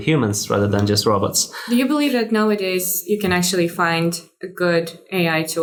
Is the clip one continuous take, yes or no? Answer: yes